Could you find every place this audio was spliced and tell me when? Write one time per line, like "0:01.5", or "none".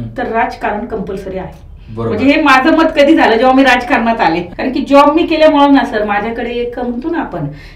0:04.5

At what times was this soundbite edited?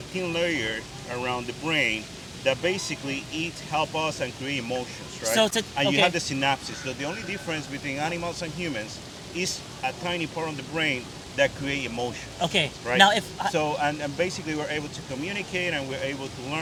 none

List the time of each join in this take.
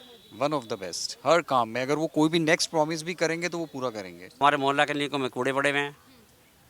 0:04.4

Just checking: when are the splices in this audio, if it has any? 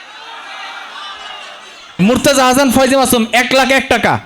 0:02.0

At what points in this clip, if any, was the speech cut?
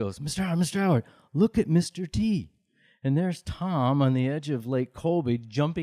0:02.8

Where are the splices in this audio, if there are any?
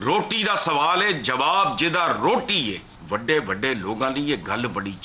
0:02.9

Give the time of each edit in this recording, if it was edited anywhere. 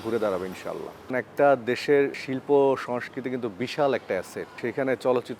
0:01.1
0:04.5

